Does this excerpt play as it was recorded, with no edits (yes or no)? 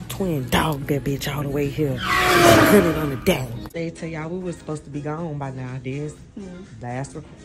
no